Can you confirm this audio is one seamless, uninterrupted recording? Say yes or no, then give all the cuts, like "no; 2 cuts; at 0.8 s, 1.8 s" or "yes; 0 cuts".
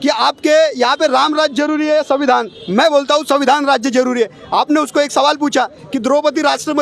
yes; 0 cuts